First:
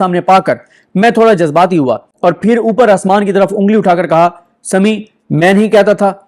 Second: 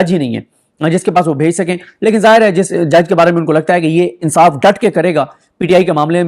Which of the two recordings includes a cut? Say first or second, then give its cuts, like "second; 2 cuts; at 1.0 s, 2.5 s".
first; 1 cut; at 2.1 s